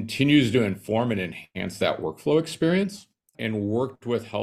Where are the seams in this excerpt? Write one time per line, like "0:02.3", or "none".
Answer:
0:03.4

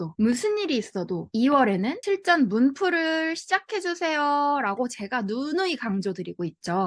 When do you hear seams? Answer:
none

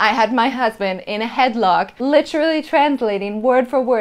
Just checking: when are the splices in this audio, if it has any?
0:01.9

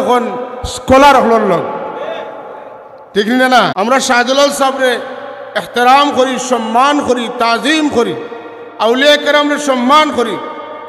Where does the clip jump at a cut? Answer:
0:03.7

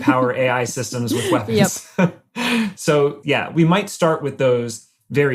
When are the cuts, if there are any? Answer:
0:03.2

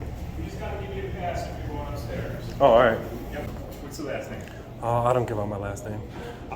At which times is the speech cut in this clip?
0:03.5

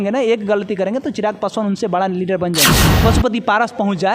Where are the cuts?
0:02.8

